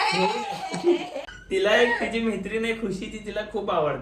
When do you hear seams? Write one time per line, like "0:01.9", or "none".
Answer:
0:01.4